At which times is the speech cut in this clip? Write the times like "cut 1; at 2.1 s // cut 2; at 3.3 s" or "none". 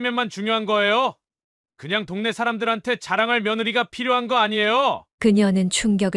none